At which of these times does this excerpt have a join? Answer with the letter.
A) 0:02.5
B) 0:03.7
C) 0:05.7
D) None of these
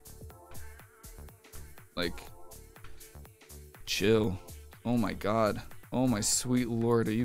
C